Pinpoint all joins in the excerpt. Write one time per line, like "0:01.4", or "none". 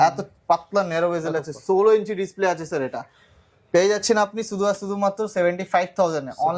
none